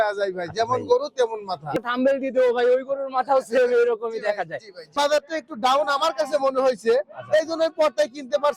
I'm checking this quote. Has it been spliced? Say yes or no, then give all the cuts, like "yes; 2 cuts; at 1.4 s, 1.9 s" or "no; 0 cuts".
yes; 2 cuts; at 1.7 s, 4.9 s